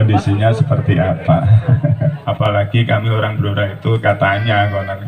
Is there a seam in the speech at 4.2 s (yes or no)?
no